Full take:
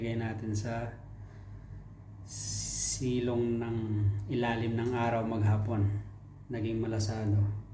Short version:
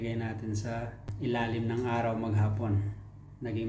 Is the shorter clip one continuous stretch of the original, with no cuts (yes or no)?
no